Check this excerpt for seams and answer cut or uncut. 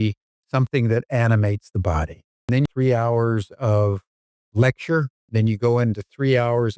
cut